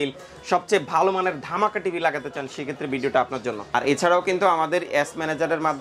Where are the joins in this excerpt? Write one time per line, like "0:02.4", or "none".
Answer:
0:03.7